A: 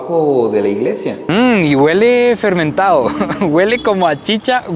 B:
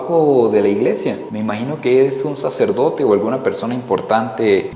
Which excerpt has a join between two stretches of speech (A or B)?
A